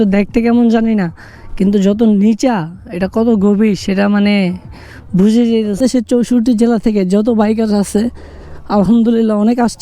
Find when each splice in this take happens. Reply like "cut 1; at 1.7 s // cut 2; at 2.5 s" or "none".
cut 1; at 5.8 s